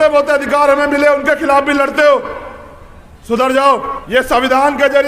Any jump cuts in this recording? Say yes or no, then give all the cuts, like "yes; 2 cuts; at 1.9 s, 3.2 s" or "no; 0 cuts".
yes; 1 cut; at 4.0 s